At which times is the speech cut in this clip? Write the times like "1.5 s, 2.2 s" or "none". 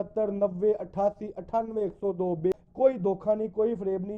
2.5 s